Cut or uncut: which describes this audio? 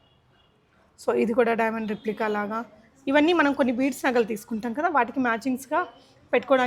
uncut